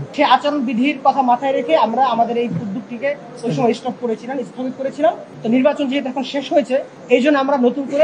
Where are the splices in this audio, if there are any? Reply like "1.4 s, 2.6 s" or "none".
5.3 s, 6.9 s